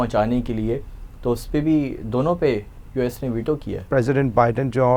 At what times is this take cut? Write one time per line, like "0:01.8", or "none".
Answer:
0:03.8